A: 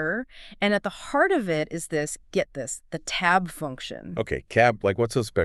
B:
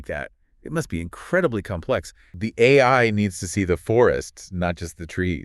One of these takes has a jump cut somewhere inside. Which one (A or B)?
B